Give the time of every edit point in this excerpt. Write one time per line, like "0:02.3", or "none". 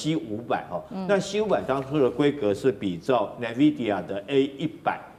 none